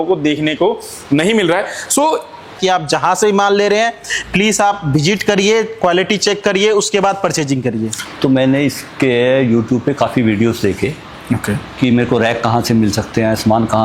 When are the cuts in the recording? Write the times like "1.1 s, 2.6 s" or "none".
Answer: 2.6 s, 8.0 s